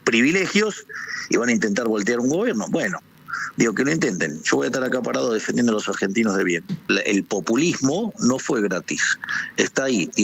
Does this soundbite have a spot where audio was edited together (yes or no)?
yes